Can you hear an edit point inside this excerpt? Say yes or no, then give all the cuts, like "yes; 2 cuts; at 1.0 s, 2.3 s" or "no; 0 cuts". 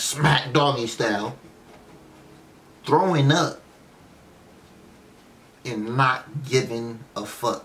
no; 0 cuts